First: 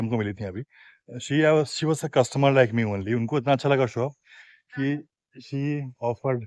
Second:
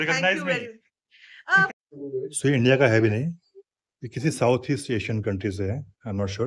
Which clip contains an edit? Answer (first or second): second